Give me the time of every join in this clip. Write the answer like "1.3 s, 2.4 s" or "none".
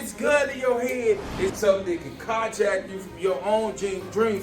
1.6 s